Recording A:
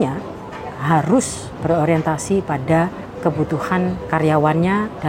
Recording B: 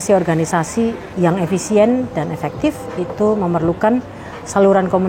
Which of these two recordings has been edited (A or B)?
A